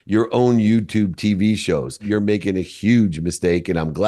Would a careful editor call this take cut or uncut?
cut